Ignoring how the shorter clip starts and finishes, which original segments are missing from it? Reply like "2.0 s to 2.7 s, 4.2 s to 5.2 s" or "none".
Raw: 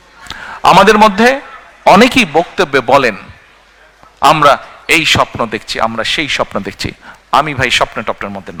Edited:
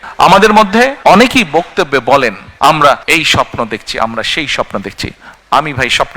1.4 s to 1.8 s, 3.2 s to 4.0 s, 4.6 s to 4.8 s